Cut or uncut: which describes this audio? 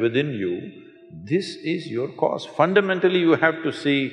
uncut